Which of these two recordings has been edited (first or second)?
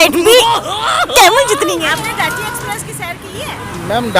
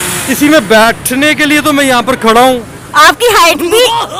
first